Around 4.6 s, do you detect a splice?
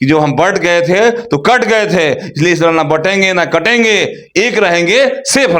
no; 0 cuts

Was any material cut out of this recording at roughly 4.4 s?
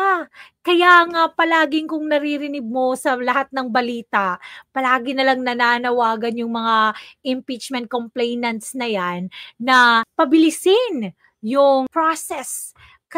no; 2 cuts; at 10.1 s, 11.9 s

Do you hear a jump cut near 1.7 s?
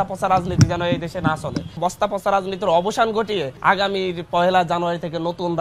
yes; 1 cut; at 1.7 s

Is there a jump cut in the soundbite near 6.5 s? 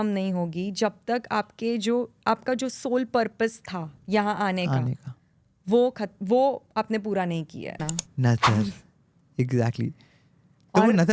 no; 1 cut; at 8.0 s

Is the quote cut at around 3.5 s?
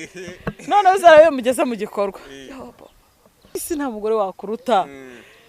yes; 1 cut; at 3.5 s

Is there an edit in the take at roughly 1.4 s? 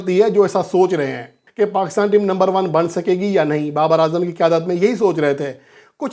yes; 1 cut; at 1.4 s

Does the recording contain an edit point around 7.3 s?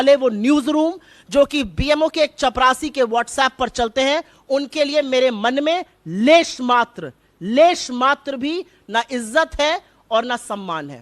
no; 0 cuts

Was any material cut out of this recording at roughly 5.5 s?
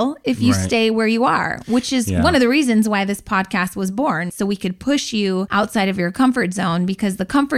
yes; 2 cuts; at 4.3 s, 5.5 s

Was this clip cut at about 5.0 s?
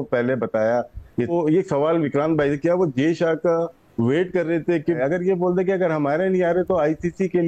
yes; 2 cuts; at 1.3 s, 5.0 s

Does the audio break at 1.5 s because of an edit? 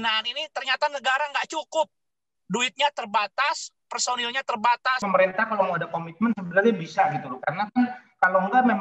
no; 1 cut; at 5.0 s

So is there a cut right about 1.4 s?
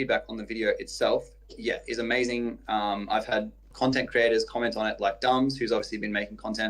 no; 1 cut; at 3.7 s

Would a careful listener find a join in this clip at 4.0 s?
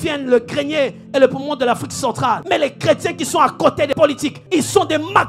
yes; 2 cuts; at 2.4 s, 4.0 s

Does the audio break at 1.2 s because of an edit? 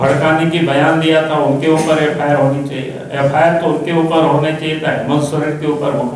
no; 0 cuts

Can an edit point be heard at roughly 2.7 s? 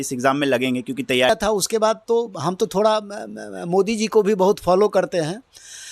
no; 1 cut; at 1.3 s

